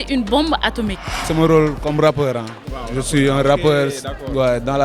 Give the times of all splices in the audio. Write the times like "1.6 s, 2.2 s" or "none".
1.2 s